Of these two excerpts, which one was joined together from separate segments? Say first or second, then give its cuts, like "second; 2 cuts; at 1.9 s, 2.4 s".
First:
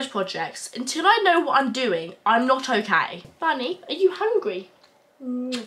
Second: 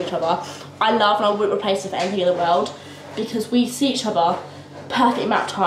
first; 1 cut; at 3.2 s